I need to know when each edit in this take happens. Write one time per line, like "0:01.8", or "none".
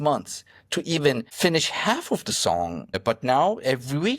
0:01.3
0:02.8